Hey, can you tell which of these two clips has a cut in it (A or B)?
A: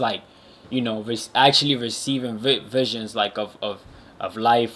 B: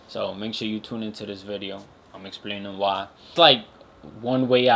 B